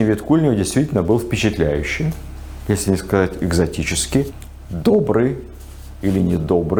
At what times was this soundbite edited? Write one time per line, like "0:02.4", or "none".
none

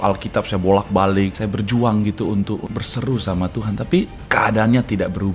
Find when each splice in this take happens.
0:01.4
0:02.7
0:04.2

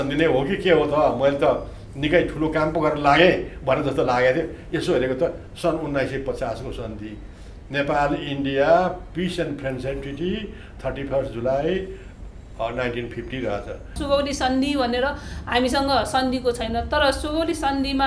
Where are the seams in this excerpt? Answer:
0:14.0

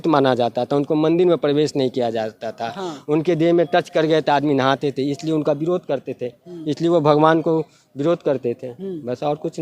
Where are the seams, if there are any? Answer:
none

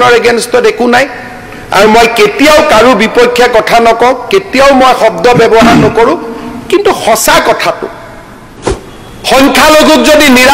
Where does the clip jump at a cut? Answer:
0:08.6

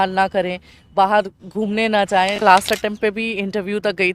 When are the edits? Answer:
0:02.4

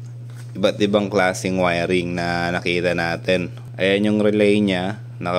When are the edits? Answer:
0:03.6

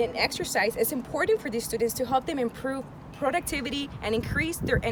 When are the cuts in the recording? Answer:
none

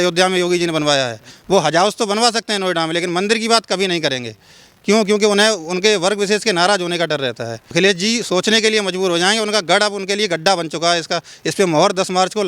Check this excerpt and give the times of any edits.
0:01.3
0:07.7

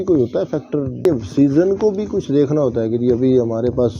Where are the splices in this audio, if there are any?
0:01.0

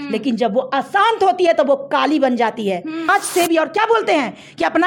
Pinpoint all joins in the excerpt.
0:03.1

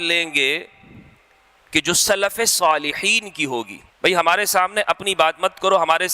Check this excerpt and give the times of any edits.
0:03.8

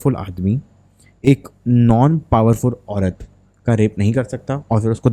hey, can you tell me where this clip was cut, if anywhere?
none

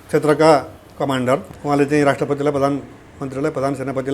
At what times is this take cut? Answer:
0:01.5

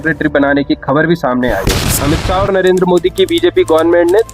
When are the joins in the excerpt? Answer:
0:01.7

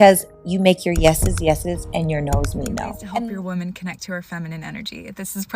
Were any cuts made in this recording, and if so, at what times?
0:03.0

